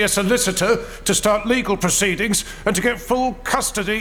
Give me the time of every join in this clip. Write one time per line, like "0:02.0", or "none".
none